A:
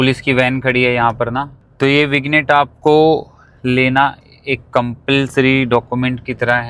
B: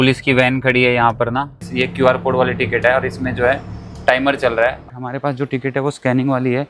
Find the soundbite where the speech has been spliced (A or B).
B